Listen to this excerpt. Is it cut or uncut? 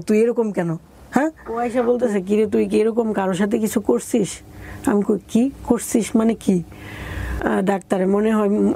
cut